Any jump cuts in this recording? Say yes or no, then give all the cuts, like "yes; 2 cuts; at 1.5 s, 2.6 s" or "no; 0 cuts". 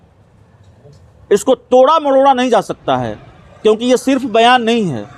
no; 0 cuts